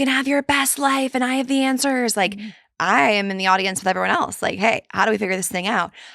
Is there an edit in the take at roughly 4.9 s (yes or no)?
no